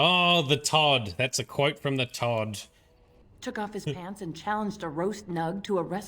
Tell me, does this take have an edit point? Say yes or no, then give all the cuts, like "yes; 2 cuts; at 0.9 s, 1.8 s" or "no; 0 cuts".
yes; 1 cut; at 3.2 s